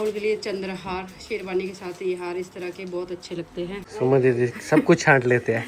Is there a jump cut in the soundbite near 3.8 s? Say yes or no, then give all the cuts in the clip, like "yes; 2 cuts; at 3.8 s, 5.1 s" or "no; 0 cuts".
yes; 1 cut; at 3.8 s